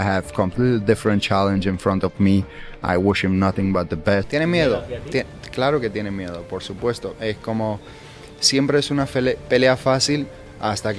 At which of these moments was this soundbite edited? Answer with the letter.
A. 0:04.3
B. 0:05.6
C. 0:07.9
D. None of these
A